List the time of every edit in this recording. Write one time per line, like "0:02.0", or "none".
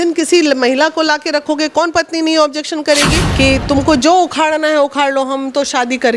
0:03.3